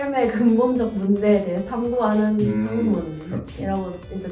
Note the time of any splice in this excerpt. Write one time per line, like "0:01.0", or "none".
none